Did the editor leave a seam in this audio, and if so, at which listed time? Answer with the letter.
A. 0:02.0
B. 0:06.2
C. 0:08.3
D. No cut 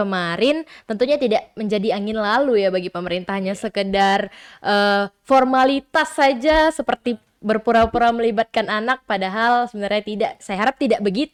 D